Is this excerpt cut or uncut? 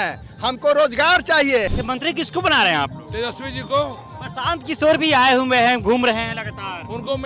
cut